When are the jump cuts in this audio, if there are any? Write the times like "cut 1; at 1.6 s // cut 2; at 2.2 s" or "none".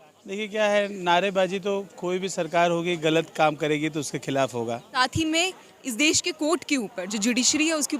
cut 1; at 5.0 s